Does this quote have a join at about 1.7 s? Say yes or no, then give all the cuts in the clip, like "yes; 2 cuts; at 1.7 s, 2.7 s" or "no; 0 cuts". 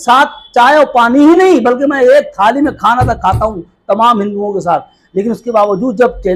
no; 0 cuts